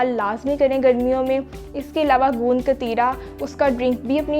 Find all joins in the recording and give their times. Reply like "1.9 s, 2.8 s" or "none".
none